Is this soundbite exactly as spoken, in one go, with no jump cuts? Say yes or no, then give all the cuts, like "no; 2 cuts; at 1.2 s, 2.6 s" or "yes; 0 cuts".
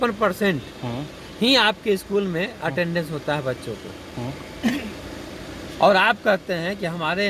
yes; 0 cuts